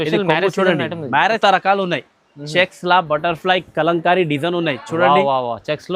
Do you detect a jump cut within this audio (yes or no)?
yes